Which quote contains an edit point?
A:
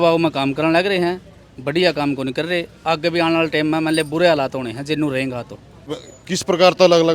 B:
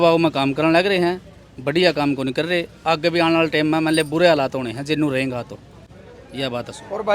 A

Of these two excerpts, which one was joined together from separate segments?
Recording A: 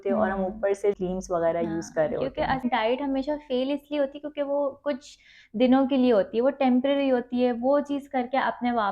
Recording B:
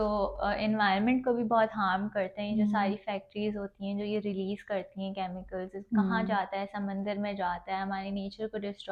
A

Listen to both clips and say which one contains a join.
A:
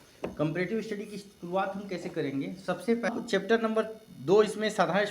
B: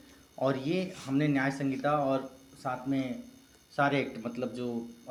A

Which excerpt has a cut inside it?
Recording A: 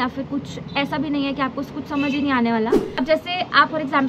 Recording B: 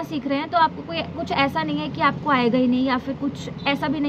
A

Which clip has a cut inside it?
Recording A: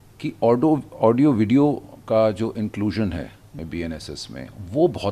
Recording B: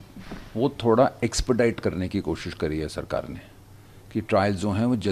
A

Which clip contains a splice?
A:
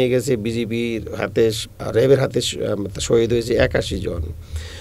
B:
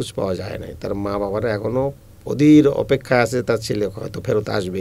A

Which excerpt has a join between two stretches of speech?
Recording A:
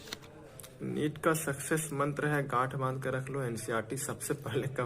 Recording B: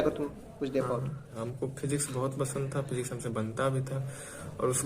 B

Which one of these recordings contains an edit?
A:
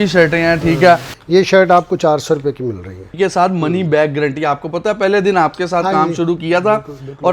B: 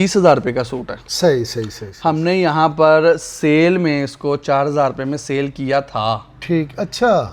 A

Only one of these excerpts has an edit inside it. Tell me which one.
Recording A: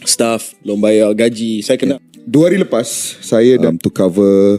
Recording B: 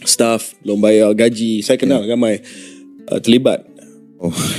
A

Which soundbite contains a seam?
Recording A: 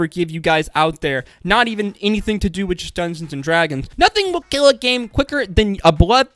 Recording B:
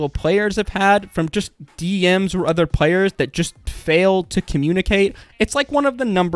A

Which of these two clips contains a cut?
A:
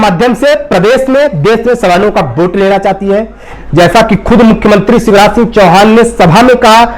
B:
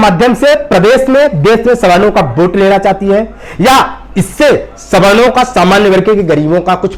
A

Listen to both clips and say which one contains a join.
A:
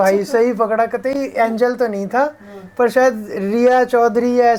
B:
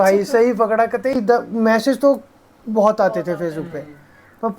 B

